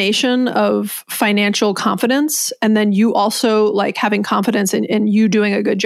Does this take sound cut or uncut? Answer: uncut